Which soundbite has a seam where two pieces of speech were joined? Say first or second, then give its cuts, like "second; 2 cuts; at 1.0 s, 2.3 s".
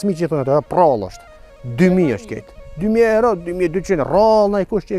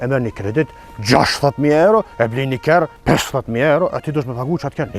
second; 1 cut; at 3.0 s